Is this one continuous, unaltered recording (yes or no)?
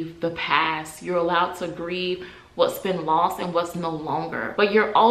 yes